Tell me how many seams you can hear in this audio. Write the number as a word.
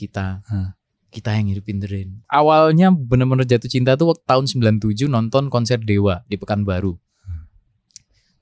one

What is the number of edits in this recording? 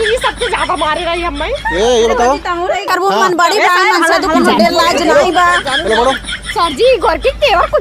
one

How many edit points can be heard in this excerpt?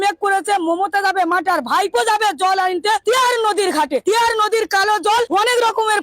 three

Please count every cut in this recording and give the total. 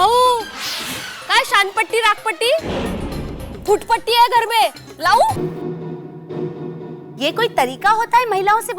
one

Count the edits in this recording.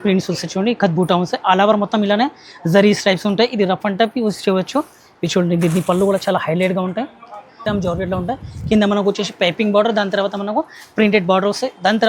one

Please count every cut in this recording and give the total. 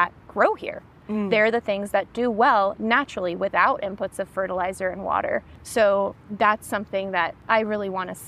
three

